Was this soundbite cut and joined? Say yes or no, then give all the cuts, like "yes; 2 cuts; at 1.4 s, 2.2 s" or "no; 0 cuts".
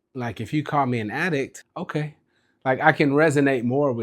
yes; 1 cut; at 1.6 s